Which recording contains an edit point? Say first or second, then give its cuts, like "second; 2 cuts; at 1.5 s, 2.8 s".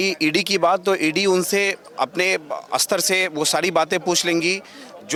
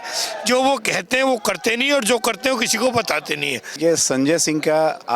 second; 1 cut; at 3.6 s